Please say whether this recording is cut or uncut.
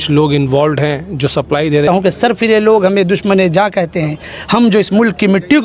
cut